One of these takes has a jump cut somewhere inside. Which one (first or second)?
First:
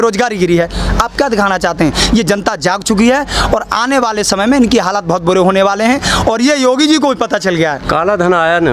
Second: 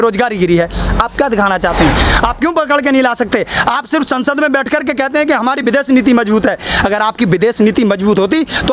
second